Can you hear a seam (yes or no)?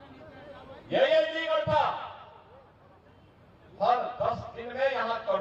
no